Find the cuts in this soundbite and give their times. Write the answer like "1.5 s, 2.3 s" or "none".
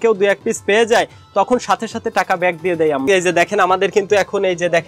3.1 s